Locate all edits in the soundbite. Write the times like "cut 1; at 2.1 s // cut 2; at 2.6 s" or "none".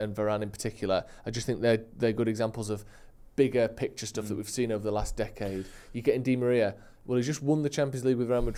none